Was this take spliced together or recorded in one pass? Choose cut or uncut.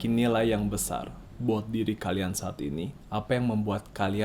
cut